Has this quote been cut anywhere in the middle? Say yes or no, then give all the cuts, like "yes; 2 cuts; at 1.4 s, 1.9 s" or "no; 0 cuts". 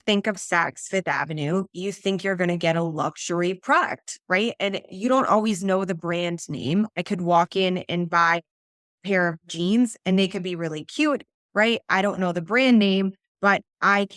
no; 0 cuts